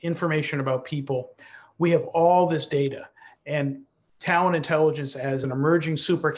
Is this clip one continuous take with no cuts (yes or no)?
no